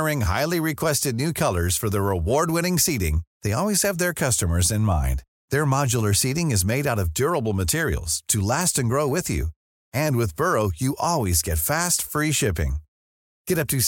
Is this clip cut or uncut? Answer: uncut